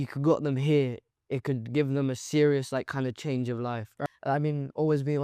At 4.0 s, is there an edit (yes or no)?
yes